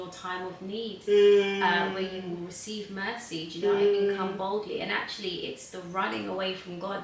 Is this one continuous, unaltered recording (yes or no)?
yes